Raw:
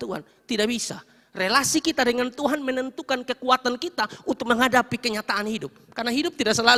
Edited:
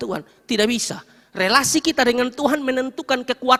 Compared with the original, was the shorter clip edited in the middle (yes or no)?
no